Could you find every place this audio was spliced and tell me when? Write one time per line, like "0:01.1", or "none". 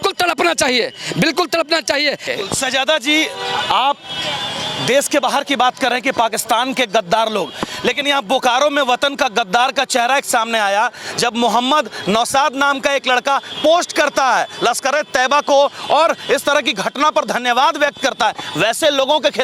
0:02.2